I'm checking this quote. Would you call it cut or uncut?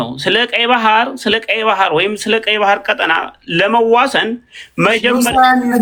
uncut